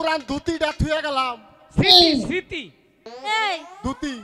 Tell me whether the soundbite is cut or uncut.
uncut